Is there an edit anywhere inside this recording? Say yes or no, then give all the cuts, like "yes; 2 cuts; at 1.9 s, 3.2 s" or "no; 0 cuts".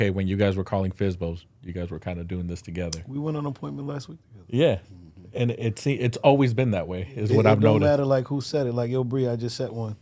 no; 0 cuts